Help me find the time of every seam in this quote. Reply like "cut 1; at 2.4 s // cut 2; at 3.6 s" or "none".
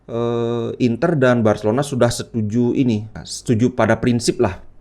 cut 1; at 3.3 s